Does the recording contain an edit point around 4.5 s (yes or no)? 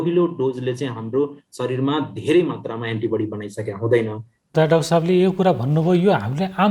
yes